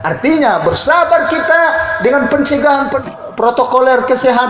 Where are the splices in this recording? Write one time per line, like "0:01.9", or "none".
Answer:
0:03.0